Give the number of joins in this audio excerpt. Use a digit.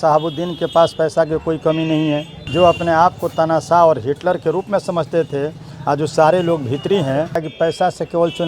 2